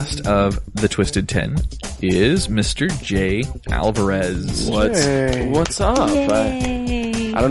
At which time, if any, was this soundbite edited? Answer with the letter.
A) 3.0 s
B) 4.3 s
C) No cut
A